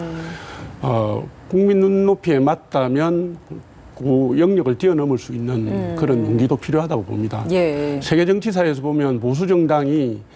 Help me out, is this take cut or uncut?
uncut